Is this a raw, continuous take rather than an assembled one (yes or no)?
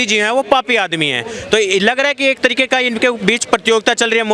yes